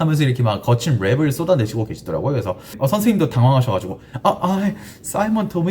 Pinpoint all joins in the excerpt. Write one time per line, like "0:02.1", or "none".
0:02.7